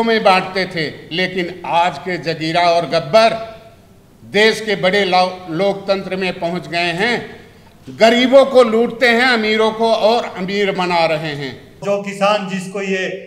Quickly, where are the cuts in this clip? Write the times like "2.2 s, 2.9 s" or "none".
11.8 s